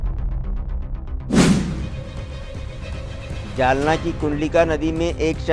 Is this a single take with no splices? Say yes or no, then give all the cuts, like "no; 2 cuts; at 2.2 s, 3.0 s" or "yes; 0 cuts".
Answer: no; 1 cut; at 1.4 s